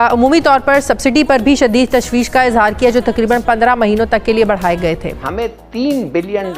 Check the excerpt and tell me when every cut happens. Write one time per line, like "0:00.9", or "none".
0:05.3